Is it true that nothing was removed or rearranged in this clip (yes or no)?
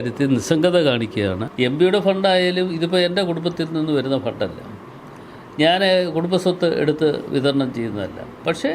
no